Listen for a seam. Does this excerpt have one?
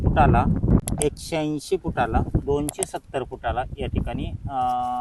yes; 2 cuts; at 0.8 s, 2.4 s

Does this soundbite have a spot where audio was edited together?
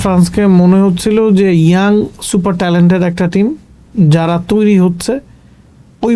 no; 0 cuts

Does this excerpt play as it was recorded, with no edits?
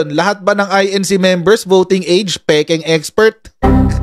yes; 0 cuts

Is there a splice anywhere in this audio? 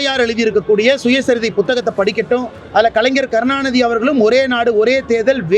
yes; 1 cut; at 2.6 s

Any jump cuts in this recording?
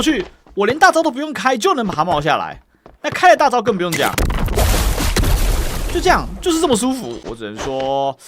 yes; 1 cut; at 7.2 s

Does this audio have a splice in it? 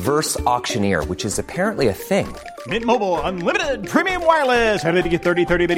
no; 0 cuts

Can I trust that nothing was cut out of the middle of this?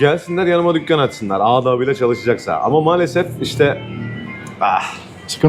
yes; 0 cuts

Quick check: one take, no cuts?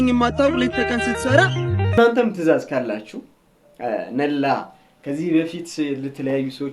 no; 1 cut; at 2.0 s

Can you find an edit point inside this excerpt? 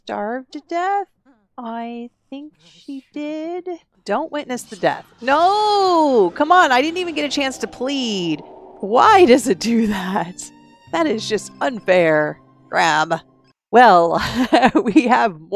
yes; 1 cut; at 3.9 s

